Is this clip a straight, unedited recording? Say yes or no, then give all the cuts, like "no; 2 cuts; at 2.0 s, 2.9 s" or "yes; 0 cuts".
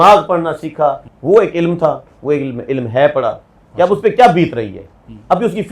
no; 1 cut; at 1.1 s